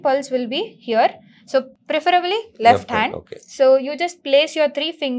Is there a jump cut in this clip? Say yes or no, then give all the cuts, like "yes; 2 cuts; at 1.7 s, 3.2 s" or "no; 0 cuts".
no; 0 cuts